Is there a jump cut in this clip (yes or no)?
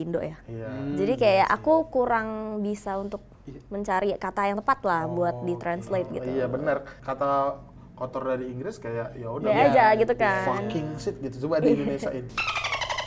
yes